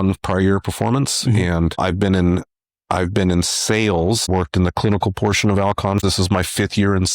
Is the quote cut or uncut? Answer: cut